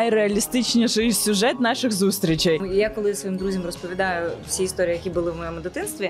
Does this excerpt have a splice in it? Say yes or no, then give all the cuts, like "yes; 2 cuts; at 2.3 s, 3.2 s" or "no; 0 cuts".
yes; 1 cut; at 2.6 s